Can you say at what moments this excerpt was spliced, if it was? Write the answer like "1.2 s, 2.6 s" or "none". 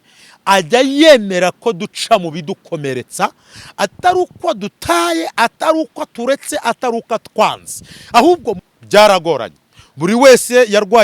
8.5 s